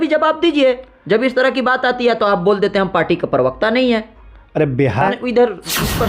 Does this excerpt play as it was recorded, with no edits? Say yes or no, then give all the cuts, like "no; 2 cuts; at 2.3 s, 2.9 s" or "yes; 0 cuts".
no; 1 cut; at 5.1 s